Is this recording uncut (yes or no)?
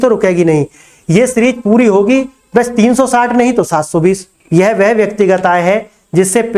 no